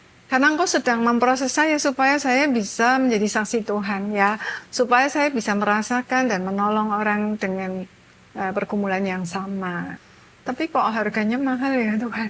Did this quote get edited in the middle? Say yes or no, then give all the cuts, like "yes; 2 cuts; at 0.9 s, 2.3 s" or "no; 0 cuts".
yes; 1 cut; at 10.0 s